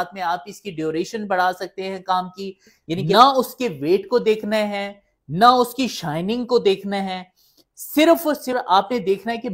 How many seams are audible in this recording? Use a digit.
2